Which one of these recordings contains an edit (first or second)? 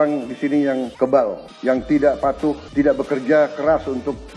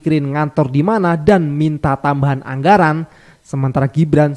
first